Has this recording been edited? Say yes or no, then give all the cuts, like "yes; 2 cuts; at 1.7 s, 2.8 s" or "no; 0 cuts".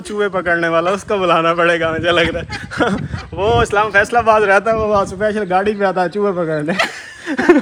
no; 0 cuts